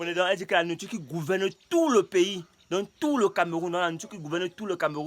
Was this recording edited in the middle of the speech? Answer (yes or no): no